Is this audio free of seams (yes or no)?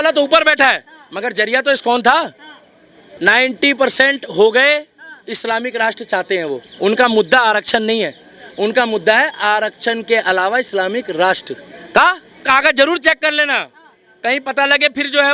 no